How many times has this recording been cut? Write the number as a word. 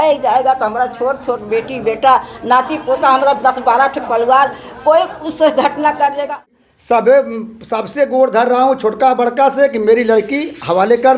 one